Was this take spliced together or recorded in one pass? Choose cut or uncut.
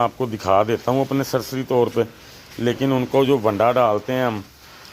uncut